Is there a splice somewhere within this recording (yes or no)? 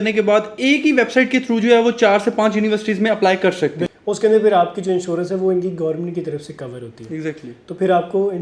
yes